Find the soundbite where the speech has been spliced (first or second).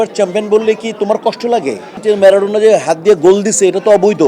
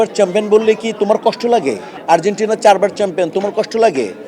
first